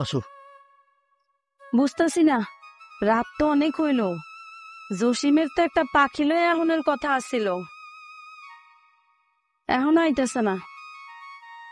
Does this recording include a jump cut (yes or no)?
yes